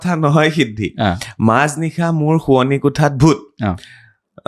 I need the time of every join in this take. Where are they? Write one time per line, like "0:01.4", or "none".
none